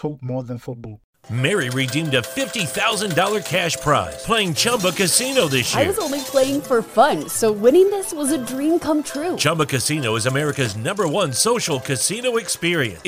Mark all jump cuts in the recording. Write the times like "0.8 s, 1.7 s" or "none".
1.0 s

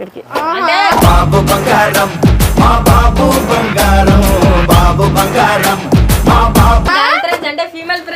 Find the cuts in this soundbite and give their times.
none

